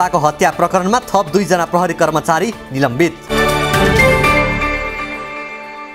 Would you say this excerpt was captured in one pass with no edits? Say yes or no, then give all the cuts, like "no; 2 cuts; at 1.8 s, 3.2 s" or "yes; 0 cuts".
no; 1 cut; at 3.2 s